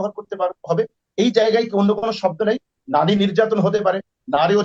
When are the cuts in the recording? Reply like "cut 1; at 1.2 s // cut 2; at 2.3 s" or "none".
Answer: none